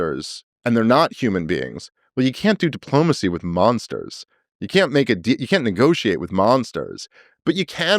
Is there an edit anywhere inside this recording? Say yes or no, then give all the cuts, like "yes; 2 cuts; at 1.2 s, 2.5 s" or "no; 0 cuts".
no; 0 cuts